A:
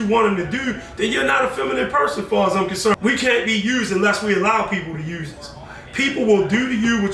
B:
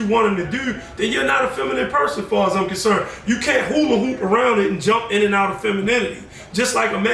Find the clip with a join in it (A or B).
A